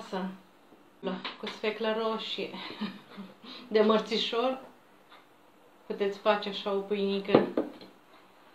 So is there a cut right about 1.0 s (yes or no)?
yes